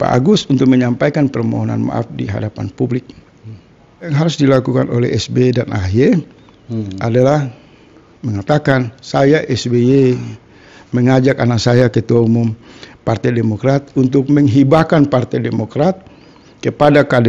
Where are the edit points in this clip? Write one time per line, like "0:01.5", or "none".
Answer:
0:04.1